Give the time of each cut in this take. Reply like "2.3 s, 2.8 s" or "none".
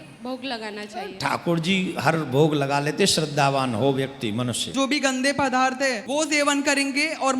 4.7 s, 6.0 s